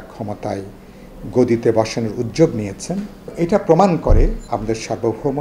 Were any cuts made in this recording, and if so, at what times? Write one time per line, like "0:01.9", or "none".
0:03.3
0:04.4